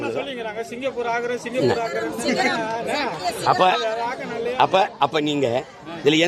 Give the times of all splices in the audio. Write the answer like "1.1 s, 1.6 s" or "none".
none